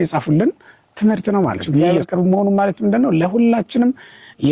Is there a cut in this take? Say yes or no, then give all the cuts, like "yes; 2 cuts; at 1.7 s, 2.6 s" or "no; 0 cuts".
yes; 1 cut; at 2.1 s